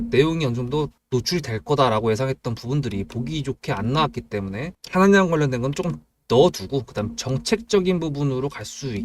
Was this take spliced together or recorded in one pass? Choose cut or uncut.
cut